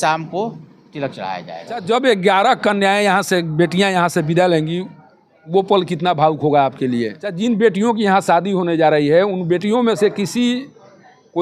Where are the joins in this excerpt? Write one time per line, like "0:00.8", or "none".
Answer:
0:01.8
0:07.2